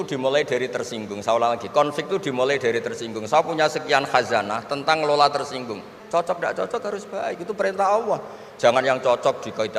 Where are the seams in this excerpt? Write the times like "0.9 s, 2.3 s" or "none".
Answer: 5.9 s